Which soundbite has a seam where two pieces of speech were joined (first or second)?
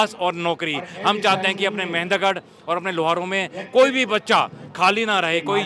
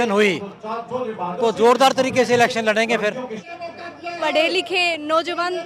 second